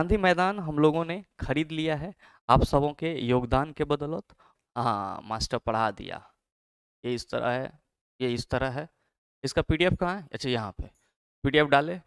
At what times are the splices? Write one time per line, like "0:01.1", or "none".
0:04.5